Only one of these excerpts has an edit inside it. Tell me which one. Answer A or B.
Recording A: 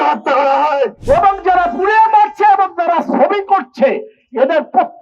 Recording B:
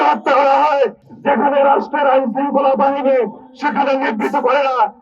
A